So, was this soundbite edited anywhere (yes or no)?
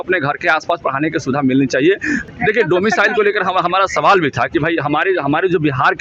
yes